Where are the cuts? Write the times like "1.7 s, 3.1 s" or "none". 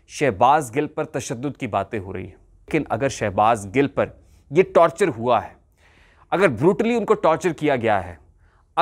2.7 s